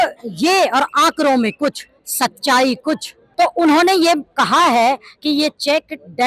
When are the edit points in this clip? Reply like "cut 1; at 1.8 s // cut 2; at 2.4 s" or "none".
cut 1; at 3.2 s